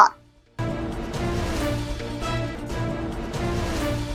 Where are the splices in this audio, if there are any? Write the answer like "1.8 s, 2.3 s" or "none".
none